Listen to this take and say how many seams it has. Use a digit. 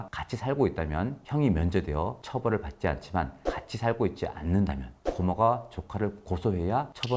0